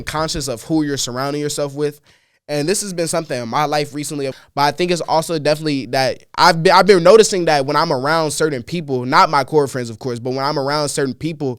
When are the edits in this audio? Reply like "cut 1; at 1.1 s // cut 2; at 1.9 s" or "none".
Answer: cut 1; at 4.4 s

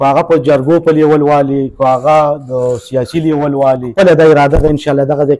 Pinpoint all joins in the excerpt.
cut 1; at 3.9 s

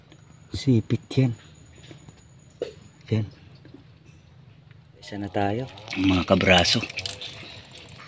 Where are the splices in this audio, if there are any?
cut 1; at 5.3 s

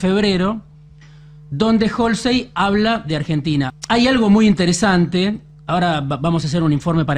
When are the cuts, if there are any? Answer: cut 1; at 3.7 s

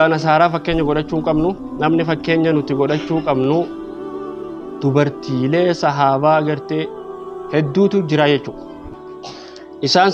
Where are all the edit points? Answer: none

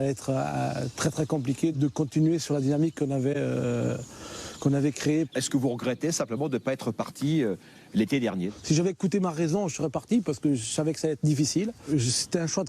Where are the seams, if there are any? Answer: cut 1; at 2.4 s

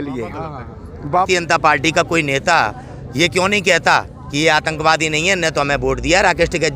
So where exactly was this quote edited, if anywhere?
cut 1; at 1.3 s

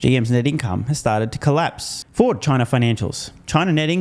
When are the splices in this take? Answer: cut 1; at 2.0 s

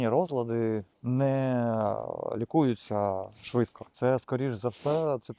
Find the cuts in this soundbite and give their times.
cut 1; at 0.9 s // cut 2; at 3.8 s

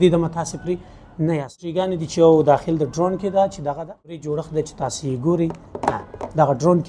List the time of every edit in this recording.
cut 1; at 1.9 s // cut 2; at 4.2 s

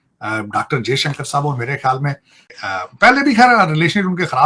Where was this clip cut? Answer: none

